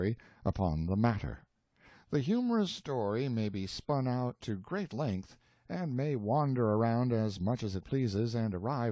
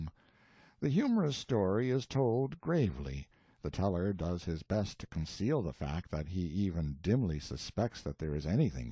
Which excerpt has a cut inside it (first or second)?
second